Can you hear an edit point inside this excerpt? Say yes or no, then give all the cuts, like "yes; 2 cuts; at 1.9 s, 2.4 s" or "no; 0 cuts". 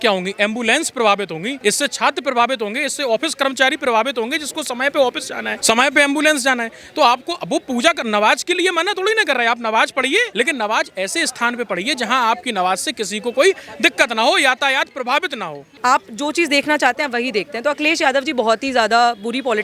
yes; 4 cuts; at 1.5 s, 5.5 s, 10.3 s, 15.6 s